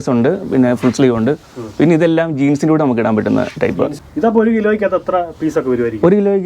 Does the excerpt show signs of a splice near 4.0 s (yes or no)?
yes